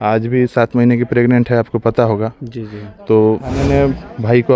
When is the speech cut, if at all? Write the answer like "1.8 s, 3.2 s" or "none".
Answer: 3.6 s